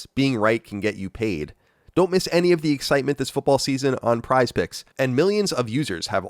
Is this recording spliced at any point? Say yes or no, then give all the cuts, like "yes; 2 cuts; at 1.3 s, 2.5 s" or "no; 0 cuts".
yes; 1 cut; at 4.9 s